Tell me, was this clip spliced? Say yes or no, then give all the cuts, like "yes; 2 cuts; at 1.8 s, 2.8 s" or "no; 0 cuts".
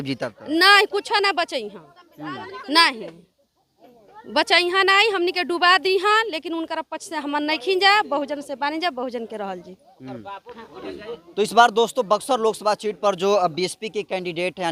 no; 0 cuts